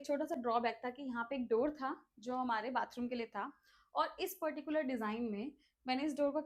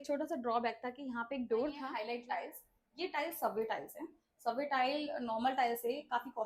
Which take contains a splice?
second; 1 cut; at 1.9 s

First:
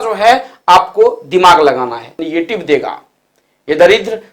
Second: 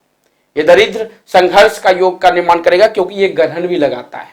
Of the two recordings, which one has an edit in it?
first; 1 cut; at 2.2 s

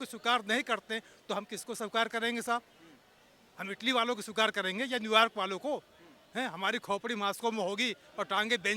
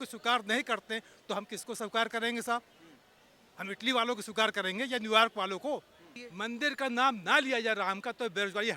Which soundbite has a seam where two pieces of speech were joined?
second; 1 cut; at 6.2 s

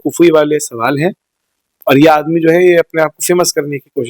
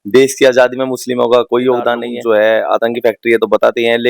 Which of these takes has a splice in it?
second; 1 cut; at 2.1 s

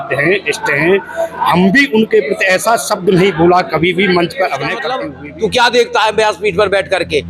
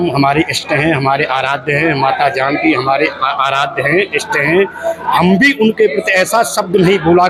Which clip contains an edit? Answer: first; 1 cut; at 4.9 s

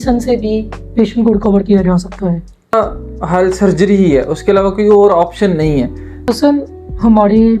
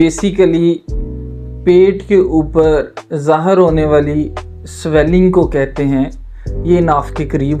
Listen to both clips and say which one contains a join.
first; 2 cuts; at 2.7 s, 6.3 s

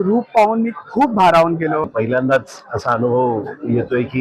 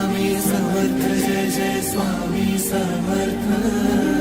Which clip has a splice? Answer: first; 1 cut; at 1.8 s

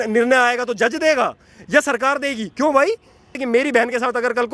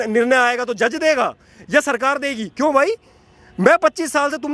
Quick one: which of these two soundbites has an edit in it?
first; 1 cut; at 3.3 s

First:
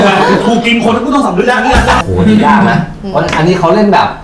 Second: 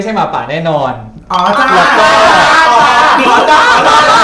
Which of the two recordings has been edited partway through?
first; 1 cut; at 2.0 s

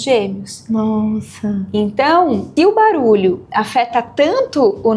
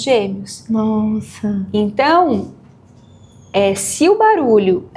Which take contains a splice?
first; 1 cut; at 2.5 s

